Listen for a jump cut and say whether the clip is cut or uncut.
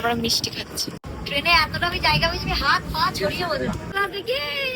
cut